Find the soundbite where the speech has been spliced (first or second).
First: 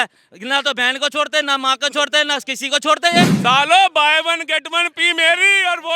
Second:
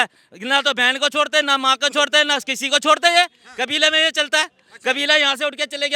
first